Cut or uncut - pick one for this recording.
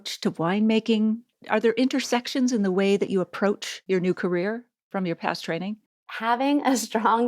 cut